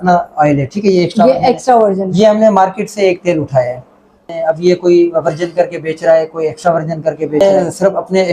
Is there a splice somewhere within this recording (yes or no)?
yes